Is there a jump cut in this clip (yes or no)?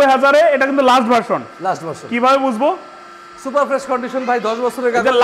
no